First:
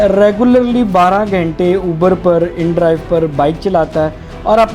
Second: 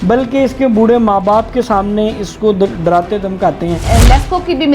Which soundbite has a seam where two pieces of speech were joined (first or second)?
second